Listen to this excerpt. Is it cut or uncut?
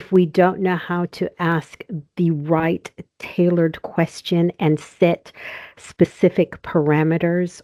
uncut